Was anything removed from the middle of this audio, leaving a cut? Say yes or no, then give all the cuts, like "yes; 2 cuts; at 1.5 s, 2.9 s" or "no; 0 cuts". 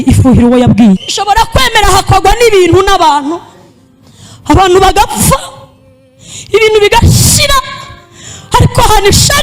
yes; 1 cut; at 1.1 s